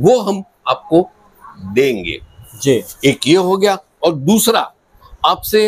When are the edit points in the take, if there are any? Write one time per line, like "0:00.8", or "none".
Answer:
none